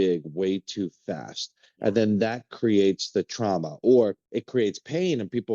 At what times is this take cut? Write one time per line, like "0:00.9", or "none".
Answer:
0:04.2